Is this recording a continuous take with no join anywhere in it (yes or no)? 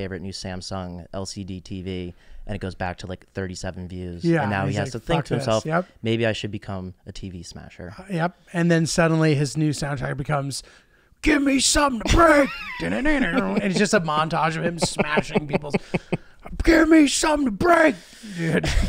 yes